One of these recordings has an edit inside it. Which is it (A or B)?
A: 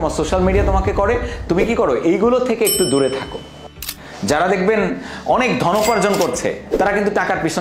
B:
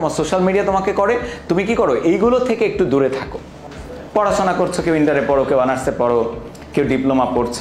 A